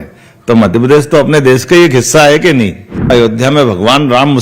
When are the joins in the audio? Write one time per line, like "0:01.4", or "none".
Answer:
0:03.1